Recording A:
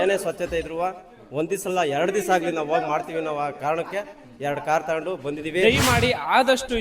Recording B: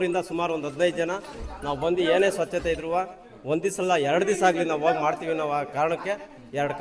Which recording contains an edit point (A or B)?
A